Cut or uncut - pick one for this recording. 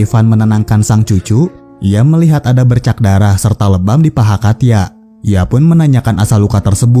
uncut